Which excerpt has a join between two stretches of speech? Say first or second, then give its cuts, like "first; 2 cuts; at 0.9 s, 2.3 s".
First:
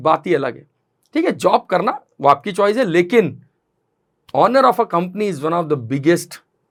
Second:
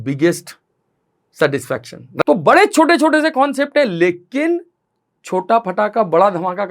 second; 1 cut; at 2.2 s